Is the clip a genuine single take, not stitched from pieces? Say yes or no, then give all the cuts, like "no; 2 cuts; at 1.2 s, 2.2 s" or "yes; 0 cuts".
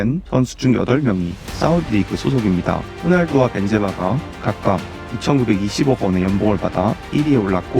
yes; 0 cuts